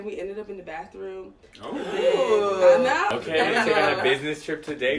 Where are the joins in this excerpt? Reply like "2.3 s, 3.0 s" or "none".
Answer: 3.1 s